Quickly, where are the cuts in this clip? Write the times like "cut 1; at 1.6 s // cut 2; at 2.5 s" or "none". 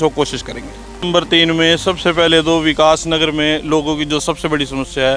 cut 1; at 1.1 s